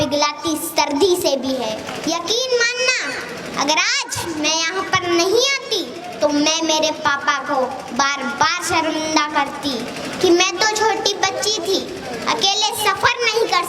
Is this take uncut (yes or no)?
no